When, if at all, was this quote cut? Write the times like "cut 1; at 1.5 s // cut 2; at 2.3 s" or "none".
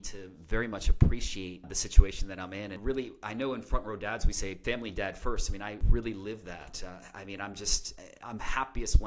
cut 1; at 1.7 s // cut 2; at 2.8 s // cut 3; at 4.6 s // cut 4; at 5.8 s